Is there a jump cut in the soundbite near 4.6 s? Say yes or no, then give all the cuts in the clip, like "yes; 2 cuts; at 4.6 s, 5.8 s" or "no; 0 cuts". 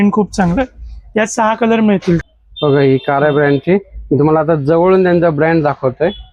no; 1 cut; at 2.3 s